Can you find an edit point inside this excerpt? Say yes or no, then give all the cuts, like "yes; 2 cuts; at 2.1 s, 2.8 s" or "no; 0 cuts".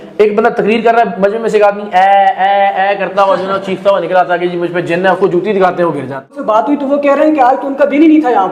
yes; 1 cut; at 6.7 s